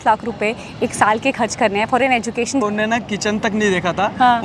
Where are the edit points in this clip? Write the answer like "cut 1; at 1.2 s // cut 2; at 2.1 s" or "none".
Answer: cut 1; at 2.6 s